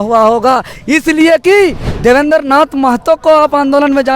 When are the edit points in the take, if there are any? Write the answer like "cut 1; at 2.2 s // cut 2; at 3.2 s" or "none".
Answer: cut 1; at 1.9 s

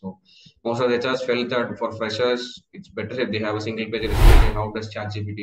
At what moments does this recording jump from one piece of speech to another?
cut 1; at 4.4 s

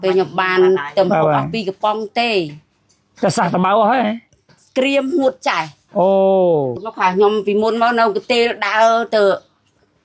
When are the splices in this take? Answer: cut 1; at 6.8 s

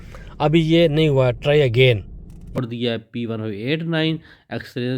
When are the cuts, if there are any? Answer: cut 1; at 2.4 s

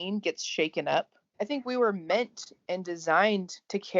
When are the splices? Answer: cut 1; at 1.4 s

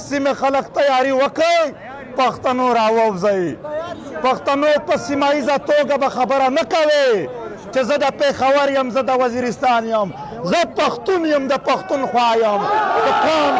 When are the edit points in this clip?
none

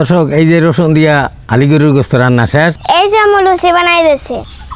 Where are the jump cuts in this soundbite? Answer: none

